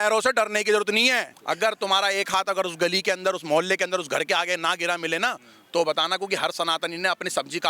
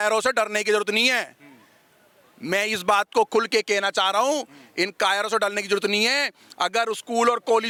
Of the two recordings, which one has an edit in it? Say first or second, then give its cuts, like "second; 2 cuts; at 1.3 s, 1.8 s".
first; 1 cut; at 1.3 s